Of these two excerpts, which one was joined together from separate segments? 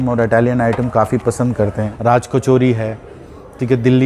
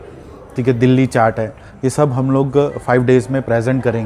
first; 1 cut; at 1.9 s

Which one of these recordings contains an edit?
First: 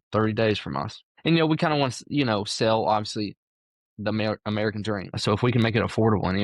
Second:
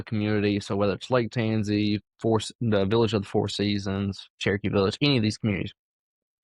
first; 2 cuts; at 1.1 s, 5.2 s

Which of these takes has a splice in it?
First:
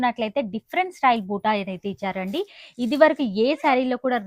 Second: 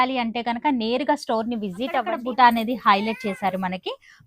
second; 1 cut; at 2.1 s

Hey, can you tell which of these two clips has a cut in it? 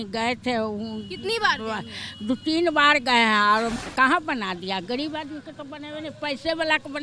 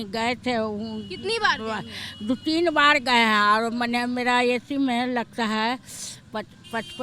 first; 1 cut; at 3.7 s

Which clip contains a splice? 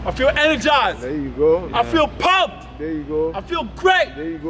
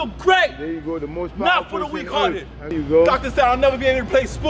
second; 1 cut; at 2.7 s

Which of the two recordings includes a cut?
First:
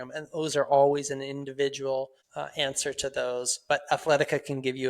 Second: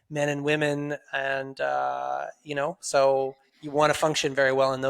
first; 1 cut; at 2.2 s

